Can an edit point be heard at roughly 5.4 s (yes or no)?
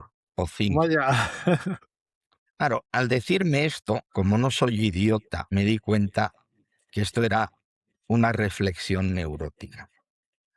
yes